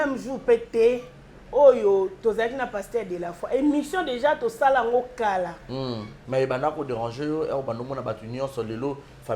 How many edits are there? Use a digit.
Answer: 1